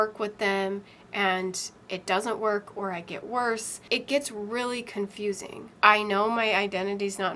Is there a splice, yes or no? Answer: yes